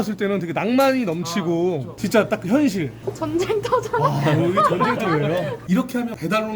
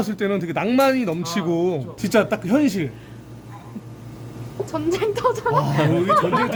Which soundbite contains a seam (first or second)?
first